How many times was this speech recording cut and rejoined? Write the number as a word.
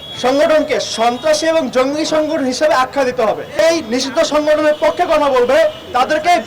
one